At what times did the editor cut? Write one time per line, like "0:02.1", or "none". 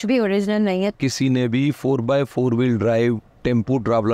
0:00.9